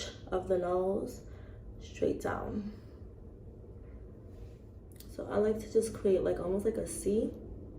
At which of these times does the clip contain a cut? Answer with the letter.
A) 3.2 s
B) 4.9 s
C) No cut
B